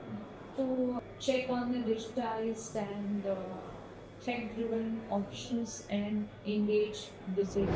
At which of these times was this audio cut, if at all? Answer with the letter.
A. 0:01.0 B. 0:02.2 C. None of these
A